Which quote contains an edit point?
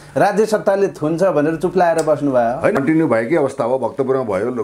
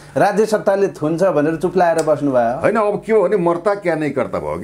first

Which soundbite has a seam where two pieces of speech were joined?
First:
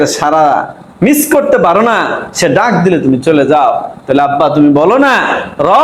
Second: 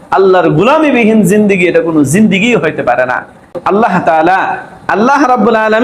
second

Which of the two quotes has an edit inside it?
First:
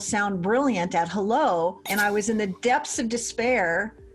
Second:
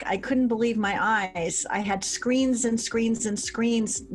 first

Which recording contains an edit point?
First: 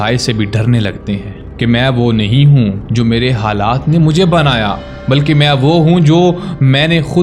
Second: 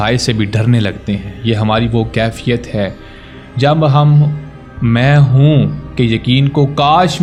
first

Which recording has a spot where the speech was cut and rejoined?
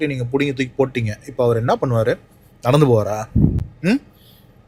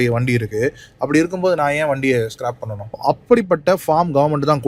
second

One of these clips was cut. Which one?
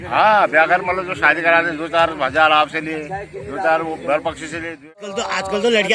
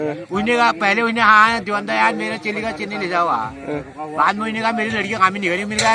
first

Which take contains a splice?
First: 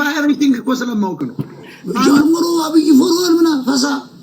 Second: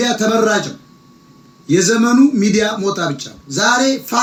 first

